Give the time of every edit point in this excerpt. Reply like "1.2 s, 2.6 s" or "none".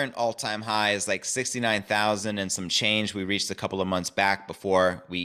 none